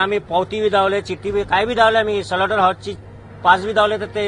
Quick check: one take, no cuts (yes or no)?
yes